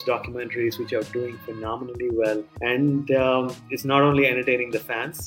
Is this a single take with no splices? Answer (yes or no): no